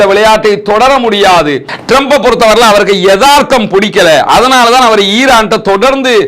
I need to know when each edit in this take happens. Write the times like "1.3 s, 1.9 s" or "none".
1.7 s